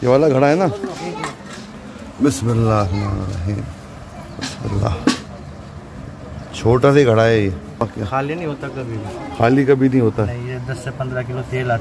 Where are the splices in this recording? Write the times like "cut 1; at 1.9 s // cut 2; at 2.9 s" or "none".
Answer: cut 1; at 7.8 s